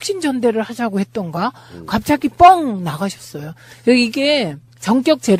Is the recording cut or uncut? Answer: uncut